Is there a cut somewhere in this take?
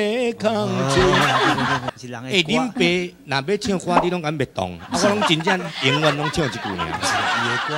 yes; 1 cut; at 1.8 s

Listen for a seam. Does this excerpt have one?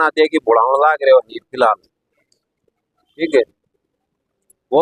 no; 0 cuts

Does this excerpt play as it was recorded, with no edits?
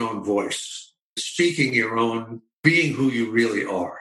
no; 2 cuts; at 1.2 s, 2.6 s

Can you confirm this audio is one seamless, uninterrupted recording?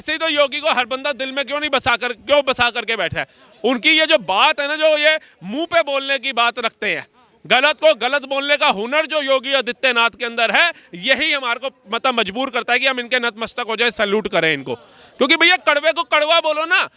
yes; 0 cuts

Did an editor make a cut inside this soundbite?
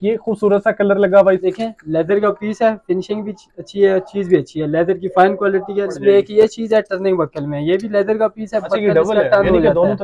yes; 2 cuts; at 1.4 s, 5.9 s

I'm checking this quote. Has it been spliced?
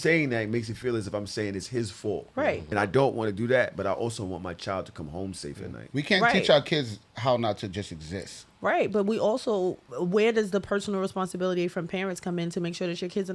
yes; 2 cuts; at 2.8 s, 9.9 s

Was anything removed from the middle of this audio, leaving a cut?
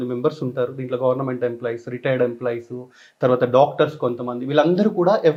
no; 0 cuts

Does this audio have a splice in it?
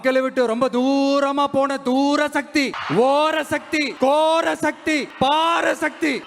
yes; 3 cuts; at 2.8 s, 3.9 s, 5.1 s

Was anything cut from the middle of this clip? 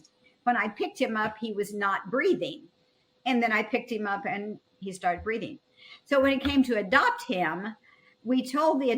yes; 1 cut; at 4.8 s

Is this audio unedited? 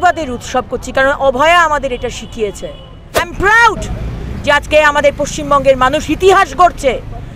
no; 1 cut; at 3.2 s

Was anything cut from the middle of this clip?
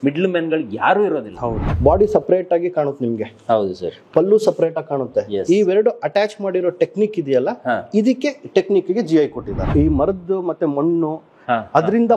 yes; 2 cuts; at 1.6 s, 9.6 s

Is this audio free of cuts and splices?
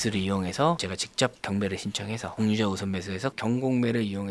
no; 1 cut; at 3.4 s

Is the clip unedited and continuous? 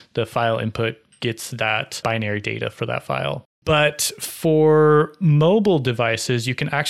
no; 2 cuts; at 2.0 s, 3.5 s

